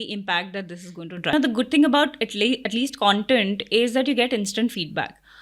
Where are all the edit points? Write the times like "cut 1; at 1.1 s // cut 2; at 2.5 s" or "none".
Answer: cut 1; at 1.3 s